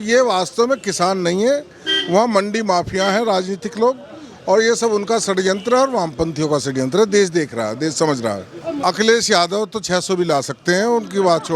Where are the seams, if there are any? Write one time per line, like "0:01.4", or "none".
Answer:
0:08.8